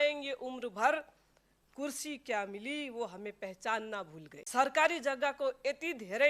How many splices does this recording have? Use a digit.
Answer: 1